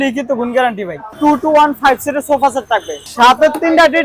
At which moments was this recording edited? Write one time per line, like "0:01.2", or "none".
0:01.1
0:03.0